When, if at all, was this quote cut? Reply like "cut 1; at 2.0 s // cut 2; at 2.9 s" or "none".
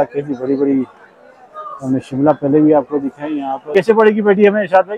cut 1; at 3.7 s